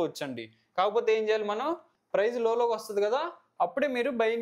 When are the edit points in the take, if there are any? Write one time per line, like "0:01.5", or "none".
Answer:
0:01.9